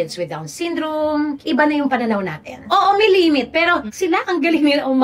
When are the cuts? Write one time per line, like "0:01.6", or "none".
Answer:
0:01.4
0:02.6